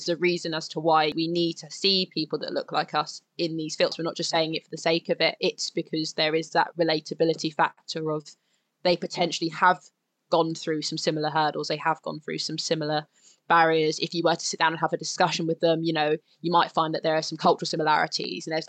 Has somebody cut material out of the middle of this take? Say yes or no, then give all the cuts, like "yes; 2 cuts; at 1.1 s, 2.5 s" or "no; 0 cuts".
yes; 2 cuts; at 1.1 s, 3.9 s